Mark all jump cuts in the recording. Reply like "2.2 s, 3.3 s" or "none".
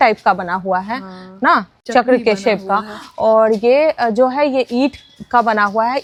none